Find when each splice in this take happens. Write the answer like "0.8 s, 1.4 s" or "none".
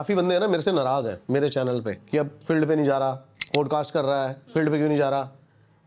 1.2 s, 2.0 s, 3.3 s